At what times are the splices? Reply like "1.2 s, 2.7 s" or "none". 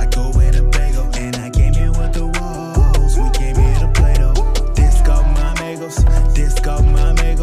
none